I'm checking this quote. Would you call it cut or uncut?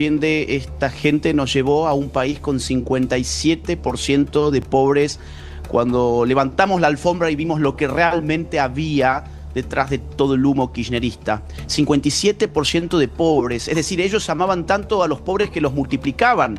uncut